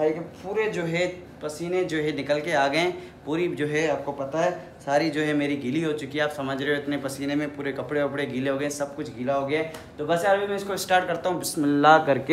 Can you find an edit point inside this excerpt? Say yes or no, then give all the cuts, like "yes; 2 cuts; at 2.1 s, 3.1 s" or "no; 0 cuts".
yes; 1 cut; at 9.8 s